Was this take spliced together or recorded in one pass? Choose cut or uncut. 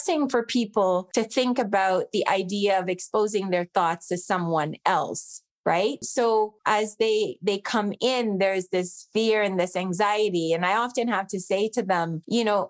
uncut